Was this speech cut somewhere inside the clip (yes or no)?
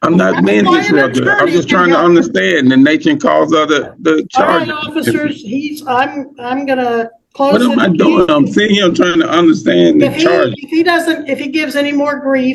no